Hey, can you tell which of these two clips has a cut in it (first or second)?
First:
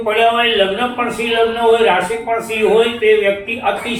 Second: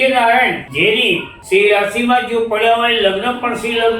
second